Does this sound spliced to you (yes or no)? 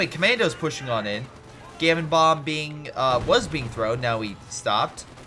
no